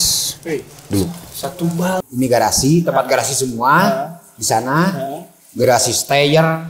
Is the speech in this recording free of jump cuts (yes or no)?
no